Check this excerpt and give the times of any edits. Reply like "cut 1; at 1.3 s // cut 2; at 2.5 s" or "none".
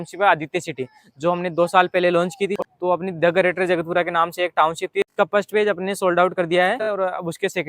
cut 1; at 2.6 s // cut 2; at 4.8 s // cut 3; at 6.8 s